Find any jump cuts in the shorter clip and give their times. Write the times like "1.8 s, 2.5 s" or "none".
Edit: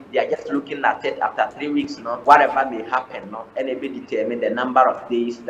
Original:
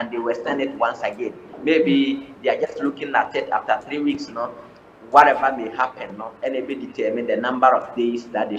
2.1 s

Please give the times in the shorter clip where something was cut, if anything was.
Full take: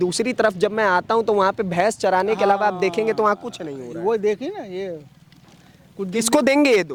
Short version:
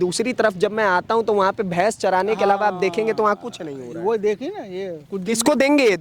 5.0 s

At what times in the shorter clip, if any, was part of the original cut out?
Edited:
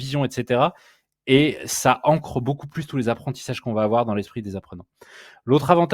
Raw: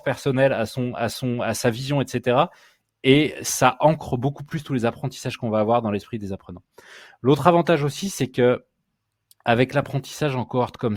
none

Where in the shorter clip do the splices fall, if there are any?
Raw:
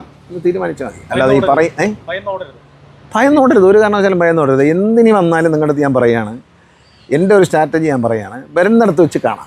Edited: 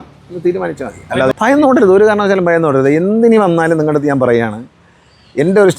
1.3 s

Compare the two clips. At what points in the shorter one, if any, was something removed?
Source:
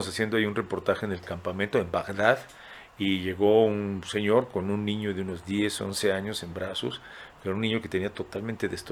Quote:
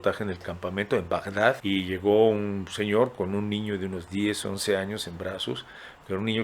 1.6 s

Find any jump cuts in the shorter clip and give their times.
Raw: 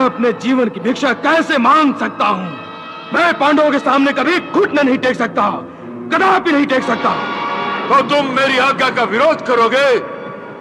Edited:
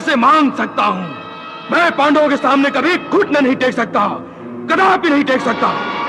none

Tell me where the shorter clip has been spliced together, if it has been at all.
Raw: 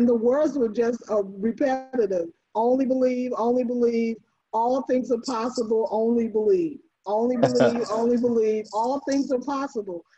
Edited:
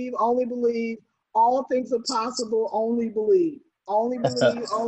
none

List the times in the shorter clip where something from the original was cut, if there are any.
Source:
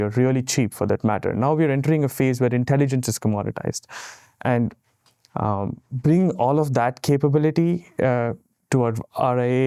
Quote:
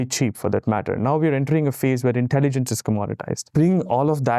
3.4 s

